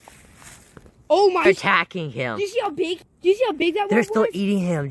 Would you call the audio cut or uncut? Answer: cut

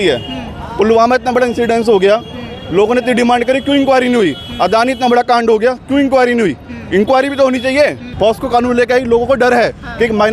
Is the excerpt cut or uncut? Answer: cut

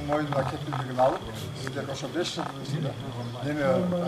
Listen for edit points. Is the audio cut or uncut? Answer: uncut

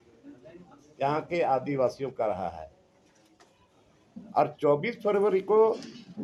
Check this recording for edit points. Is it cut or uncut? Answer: uncut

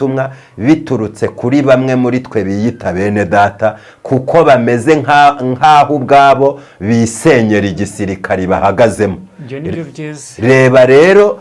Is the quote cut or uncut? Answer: uncut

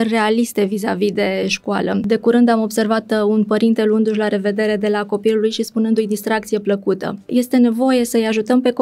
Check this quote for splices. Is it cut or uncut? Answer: cut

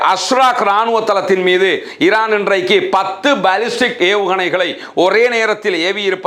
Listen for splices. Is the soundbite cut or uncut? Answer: uncut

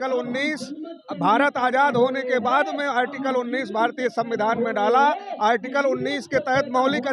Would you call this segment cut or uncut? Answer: uncut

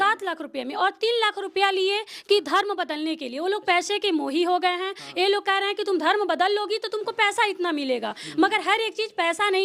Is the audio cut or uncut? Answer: uncut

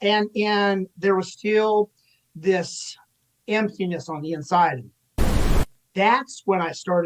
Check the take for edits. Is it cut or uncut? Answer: cut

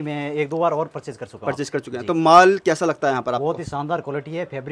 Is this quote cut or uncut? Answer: uncut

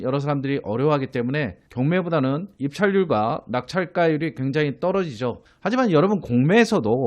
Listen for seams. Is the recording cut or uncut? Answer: cut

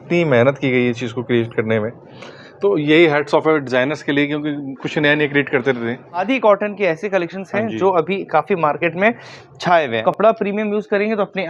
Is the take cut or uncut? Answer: cut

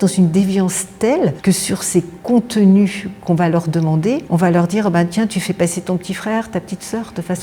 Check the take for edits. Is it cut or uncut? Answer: uncut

